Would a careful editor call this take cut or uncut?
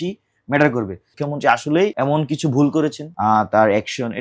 cut